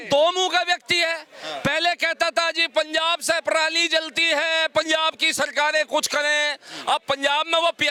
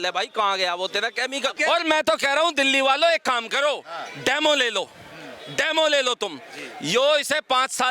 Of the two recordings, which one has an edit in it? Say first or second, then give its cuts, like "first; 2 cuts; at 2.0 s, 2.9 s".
second; 1 cut; at 1.6 s